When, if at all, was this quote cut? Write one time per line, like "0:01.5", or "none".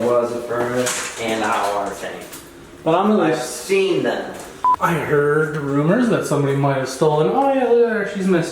0:04.6